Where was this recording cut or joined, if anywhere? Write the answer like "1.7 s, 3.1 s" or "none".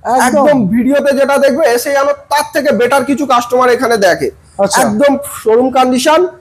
none